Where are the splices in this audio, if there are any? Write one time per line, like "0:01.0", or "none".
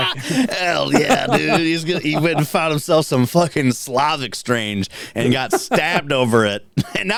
none